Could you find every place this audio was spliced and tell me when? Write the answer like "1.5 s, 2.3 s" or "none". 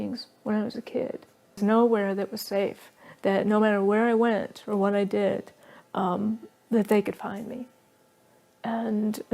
1.6 s